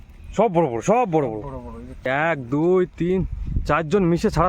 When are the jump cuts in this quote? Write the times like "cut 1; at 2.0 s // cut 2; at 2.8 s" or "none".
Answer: cut 1; at 2.0 s